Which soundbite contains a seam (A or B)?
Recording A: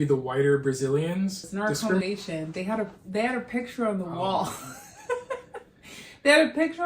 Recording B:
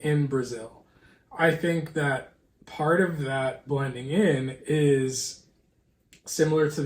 A